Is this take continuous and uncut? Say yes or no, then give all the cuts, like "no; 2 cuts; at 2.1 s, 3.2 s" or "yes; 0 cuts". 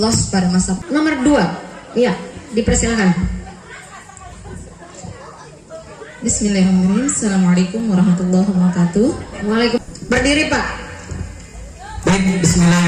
no; 2 cuts; at 0.8 s, 9.8 s